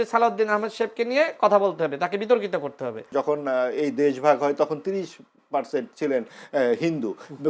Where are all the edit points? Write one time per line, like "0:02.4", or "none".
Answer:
0:03.1